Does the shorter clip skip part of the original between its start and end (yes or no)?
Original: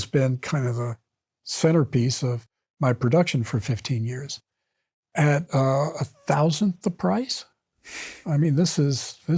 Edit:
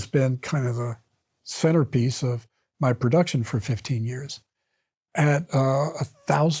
no